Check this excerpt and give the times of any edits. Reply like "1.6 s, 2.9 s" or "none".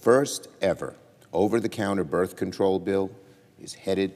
2.7 s